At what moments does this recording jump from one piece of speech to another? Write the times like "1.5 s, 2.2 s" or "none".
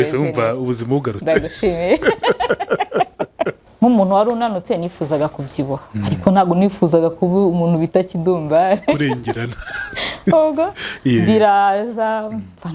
3.6 s

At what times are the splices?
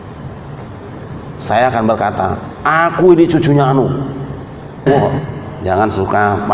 5.2 s

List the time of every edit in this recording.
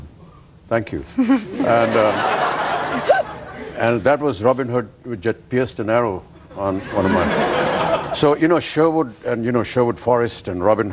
3.1 s

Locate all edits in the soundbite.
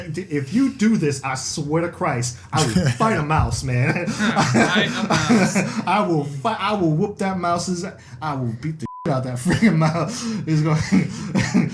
none

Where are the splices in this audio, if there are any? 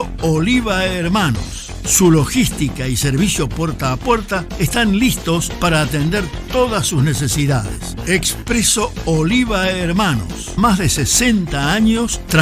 1.5 s

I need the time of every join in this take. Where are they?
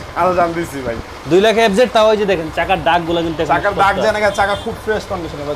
none

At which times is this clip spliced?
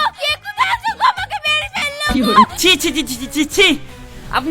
2.5 s

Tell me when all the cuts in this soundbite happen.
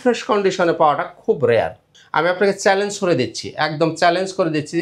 none

